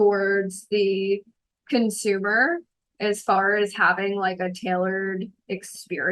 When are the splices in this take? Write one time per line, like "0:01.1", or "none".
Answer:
none